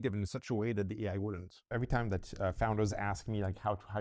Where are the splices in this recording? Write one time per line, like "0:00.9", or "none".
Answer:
0:01.6